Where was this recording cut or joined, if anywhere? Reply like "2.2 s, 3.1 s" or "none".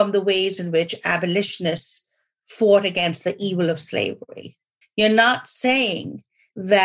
4.8 s